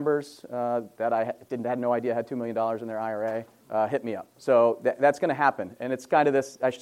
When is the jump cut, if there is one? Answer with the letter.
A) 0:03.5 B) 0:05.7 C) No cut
A